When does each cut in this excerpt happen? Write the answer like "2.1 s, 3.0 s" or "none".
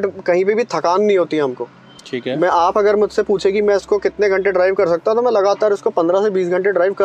none